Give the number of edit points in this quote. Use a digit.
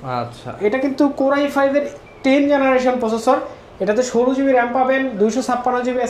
0